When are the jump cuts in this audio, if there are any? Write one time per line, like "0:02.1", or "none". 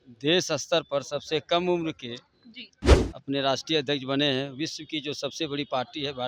none